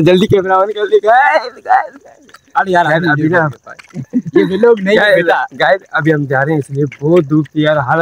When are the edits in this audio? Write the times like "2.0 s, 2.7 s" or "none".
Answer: none